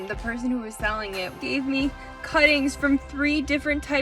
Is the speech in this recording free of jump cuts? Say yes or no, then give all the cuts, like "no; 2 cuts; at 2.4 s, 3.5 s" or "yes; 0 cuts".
no; 1 cut; at 1.4 s